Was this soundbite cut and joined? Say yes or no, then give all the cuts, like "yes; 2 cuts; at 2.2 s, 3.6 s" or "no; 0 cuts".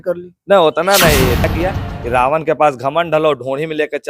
yes; 1 cut; at 1.4 s